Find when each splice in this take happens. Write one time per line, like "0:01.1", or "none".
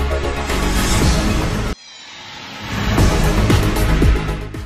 0:01.4
0:03.4

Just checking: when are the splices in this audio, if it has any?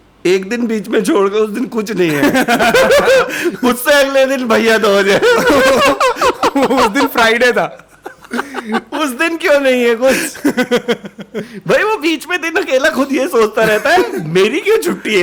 none

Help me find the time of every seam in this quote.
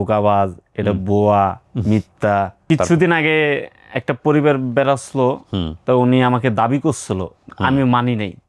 0:02.6

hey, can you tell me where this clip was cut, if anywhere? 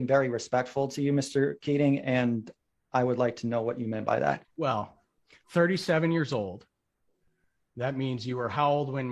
none

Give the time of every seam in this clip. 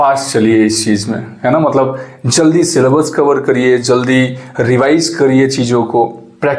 none

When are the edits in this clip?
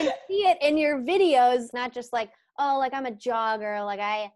0:01.7

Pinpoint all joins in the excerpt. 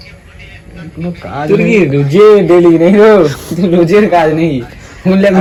none

